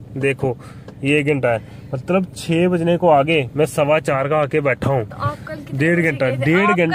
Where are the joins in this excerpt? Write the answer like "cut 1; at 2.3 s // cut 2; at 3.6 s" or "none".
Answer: none